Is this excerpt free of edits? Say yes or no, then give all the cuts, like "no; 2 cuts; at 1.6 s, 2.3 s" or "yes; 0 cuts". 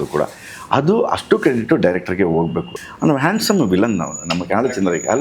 no; 1 cut; at 2.7 s